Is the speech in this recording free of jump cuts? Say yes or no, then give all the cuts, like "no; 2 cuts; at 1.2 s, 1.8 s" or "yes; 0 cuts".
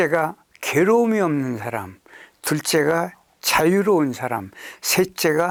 yes; 0 cuts